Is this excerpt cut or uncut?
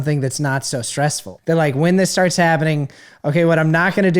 cut